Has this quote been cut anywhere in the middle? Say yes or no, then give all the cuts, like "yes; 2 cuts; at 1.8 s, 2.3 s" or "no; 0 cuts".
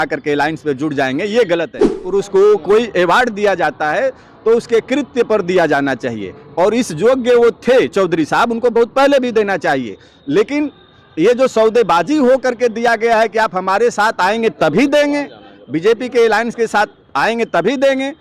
yes; 1 cut; at 2.0 s